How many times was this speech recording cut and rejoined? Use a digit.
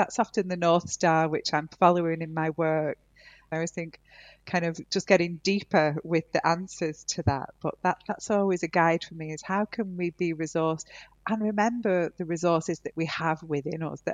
1